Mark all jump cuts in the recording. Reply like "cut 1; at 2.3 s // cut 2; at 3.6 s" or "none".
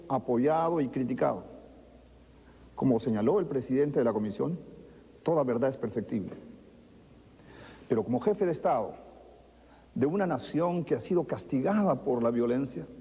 cut 1; at 8.1 s